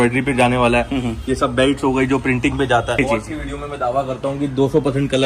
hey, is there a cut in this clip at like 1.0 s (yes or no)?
no